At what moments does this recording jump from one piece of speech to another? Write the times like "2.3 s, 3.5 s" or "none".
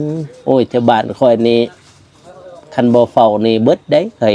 none